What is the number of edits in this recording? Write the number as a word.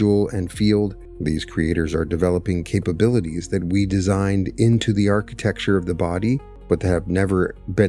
two